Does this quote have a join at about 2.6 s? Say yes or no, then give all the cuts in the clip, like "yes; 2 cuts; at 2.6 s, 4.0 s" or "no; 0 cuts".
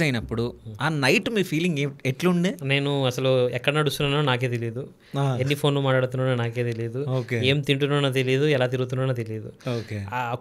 yes; 1 cut; at 2.6 s